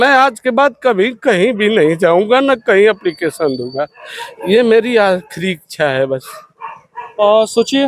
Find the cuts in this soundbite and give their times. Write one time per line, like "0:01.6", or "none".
none